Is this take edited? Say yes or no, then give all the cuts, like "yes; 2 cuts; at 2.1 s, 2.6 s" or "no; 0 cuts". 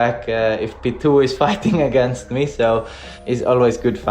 yes; 1 cut; at 3.1 s